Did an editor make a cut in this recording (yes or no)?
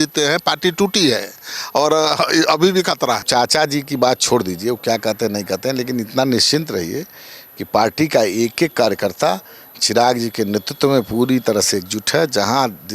yes